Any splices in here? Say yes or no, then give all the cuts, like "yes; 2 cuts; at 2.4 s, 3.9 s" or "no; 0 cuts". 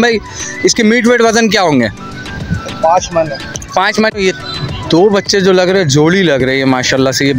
yes; 1 cut; at 4.1 s